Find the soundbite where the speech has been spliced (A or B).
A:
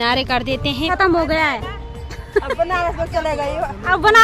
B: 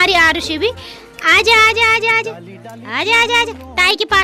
A